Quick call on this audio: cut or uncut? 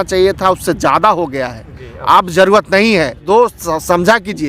cut